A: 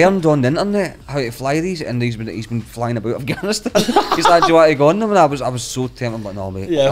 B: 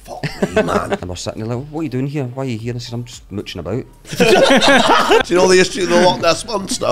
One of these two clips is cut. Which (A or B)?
B